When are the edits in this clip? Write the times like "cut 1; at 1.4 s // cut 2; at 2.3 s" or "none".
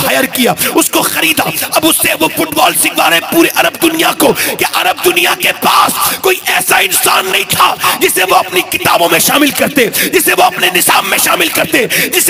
cut 1; at 5.3 s